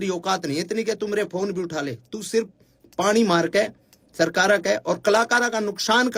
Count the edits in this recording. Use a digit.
0